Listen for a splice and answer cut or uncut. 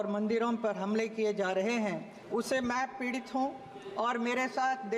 cut